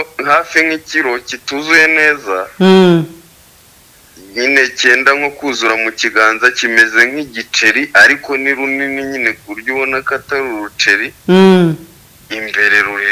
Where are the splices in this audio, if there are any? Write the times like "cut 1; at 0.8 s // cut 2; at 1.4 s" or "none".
none